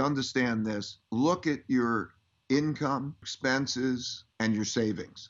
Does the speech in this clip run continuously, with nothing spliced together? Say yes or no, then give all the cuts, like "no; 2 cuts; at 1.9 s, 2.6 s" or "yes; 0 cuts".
no; 3 cuts; at 0.9 s, 3.3 s, 4.2 s